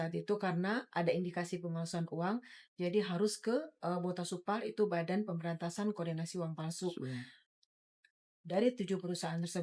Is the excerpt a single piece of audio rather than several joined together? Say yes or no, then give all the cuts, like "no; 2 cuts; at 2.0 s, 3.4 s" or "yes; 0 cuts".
yes; 0 cuts